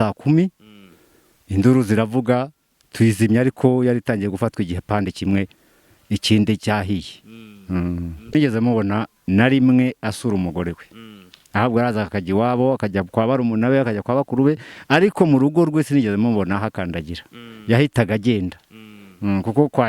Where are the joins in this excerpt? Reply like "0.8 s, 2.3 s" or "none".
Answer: 8.3 s